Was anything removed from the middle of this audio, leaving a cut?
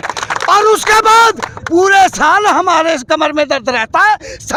no; 0 cuts

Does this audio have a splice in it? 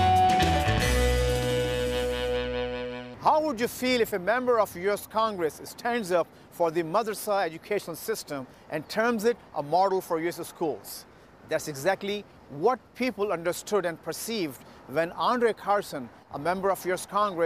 yes; 1 cut; at 3.0 s

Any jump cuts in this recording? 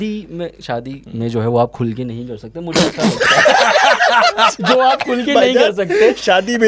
yes; 1 cut; at 1.0 s

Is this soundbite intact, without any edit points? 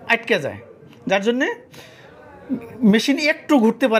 yes; 0 cuts

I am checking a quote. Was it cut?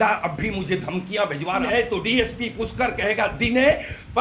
yes; 1 cut; at 1.6 s

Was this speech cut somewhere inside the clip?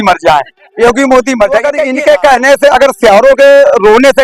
yes; 1 cut; at 1.8 s

